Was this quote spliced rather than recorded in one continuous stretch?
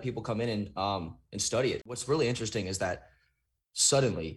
yes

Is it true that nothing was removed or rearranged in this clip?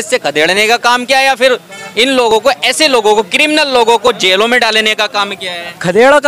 yes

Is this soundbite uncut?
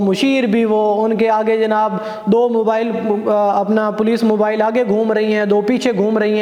yes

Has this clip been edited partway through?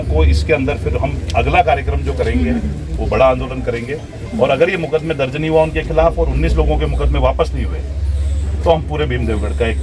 no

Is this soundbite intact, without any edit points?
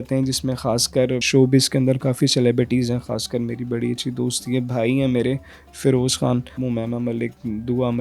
no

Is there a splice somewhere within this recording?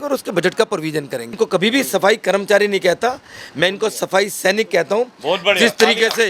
yes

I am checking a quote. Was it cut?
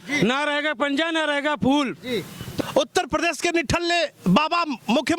yes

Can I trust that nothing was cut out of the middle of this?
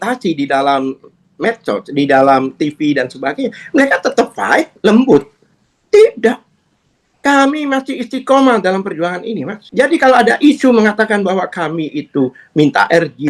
no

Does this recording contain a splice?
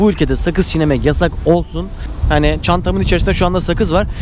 yes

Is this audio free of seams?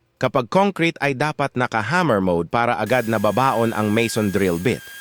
yes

